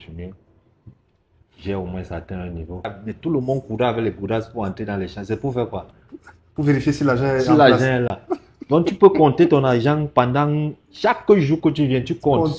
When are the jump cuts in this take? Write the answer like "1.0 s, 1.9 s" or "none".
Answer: 3.0 s

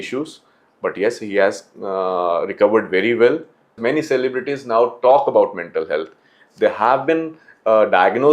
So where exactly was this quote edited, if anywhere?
3.8 s

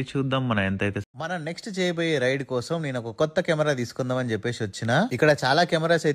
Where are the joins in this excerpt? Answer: 1.1 s

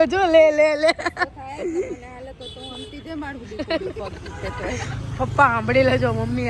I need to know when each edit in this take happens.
none

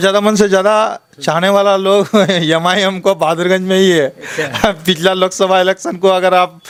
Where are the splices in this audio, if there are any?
none

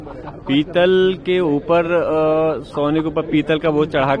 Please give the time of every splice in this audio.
none

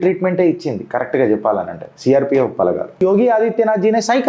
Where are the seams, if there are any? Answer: 3.0 s

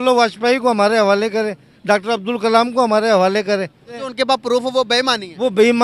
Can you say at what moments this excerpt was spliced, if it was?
4.0 s

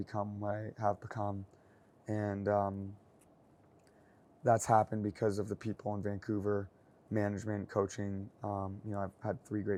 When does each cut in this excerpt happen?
none

